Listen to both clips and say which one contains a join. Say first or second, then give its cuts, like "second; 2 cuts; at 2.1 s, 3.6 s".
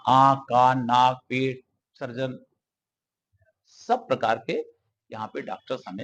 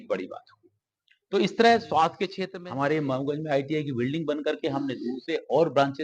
second; 1 cut; at 2.4 s